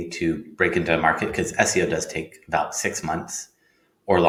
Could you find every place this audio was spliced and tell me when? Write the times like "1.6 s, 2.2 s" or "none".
none